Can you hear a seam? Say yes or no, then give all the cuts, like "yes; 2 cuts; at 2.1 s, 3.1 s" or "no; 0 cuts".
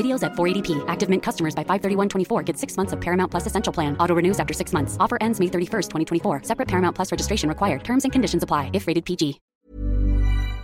yes; 1 cut; at 9.4 s